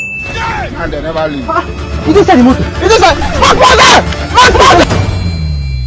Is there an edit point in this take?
yes; 1 cut; at 4.9 s

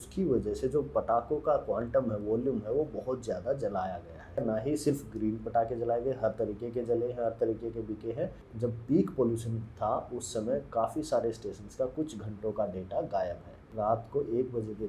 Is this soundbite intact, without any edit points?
no; 3 cuts; at 4.4 s, 8.4 s, 13.6 s

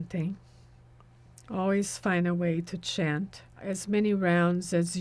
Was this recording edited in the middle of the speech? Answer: yes; 1 cut; at 3.6 s

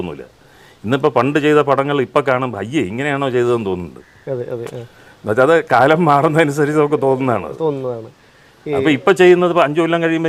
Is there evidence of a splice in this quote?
no; 0 cuts

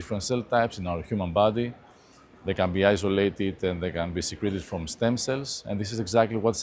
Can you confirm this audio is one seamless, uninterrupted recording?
yes; 0 cuts

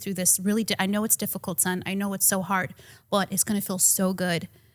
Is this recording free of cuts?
yes; 0 cuts

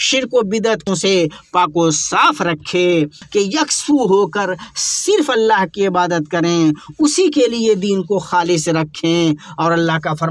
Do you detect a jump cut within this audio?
yes; 2 cuts; at 0.8 s, 3.2 s

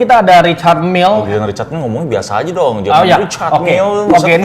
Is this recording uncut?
no; 1 cut; at 1.3 s

